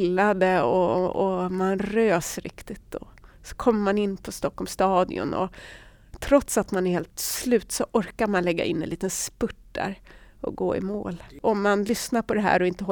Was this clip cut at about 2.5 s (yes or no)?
no